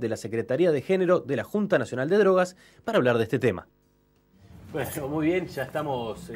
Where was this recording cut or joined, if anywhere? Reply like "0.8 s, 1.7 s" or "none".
2.0 s